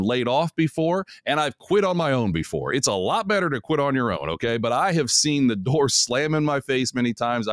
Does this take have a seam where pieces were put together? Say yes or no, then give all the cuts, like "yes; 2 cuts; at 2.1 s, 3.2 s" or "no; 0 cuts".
no; 0 cuts